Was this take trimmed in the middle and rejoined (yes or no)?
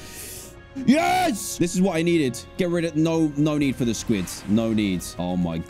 no